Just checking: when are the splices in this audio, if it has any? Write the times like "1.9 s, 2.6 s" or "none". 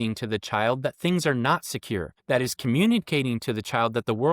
2.1 s